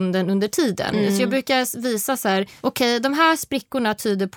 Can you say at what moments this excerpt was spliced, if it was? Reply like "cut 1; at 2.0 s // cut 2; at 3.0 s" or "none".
cut 1; at 2.5 s